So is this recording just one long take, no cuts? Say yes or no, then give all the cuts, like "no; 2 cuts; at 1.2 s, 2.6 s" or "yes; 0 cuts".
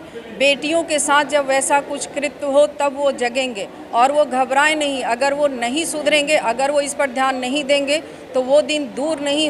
yes; 0 cuts